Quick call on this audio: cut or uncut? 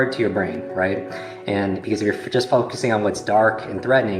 uncut